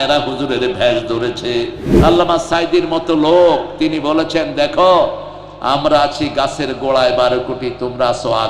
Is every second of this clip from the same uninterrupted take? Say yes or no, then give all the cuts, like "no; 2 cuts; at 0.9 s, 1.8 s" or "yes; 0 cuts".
no; 1 cut; at 1.9 s